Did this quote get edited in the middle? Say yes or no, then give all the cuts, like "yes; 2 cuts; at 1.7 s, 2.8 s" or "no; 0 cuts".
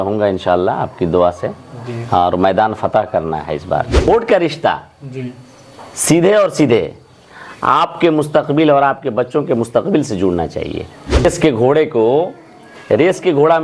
yes; 2 cuts; at 4.1 s, 11.2 s